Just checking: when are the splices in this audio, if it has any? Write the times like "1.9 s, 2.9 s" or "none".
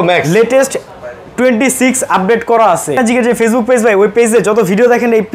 3.0 s